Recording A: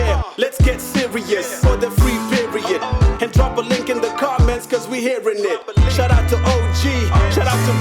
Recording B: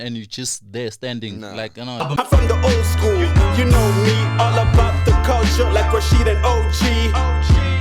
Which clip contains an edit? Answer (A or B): B